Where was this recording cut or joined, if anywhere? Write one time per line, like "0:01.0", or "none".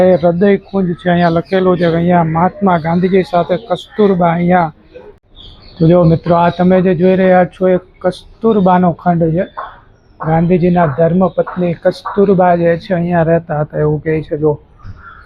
0:05.2